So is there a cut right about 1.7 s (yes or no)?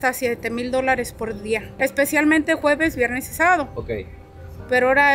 no